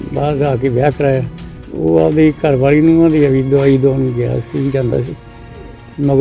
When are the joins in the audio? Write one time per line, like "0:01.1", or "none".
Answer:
0:01.6